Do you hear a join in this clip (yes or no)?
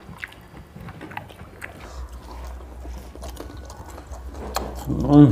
yes